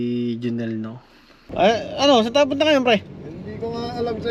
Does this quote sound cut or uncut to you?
cut